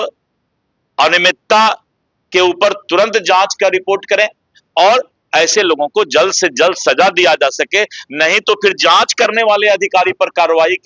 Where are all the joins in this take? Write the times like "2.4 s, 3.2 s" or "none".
none